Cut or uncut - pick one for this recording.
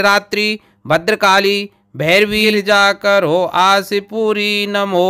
cut